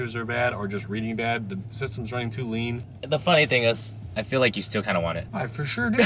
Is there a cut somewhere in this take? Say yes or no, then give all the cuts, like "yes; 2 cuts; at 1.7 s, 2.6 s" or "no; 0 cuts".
yes; 2 cuts; at 2.8 s, 5.2 s